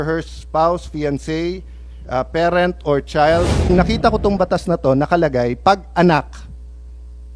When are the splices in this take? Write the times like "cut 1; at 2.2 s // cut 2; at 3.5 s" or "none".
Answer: cut 1; at 3.7 s